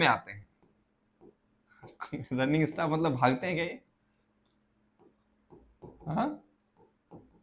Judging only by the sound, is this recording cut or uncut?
uncut